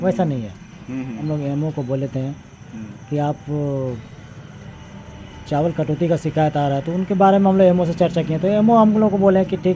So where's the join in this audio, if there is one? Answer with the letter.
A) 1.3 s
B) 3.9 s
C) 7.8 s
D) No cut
A